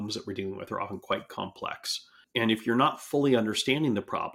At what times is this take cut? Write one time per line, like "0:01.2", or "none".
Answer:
0:02.2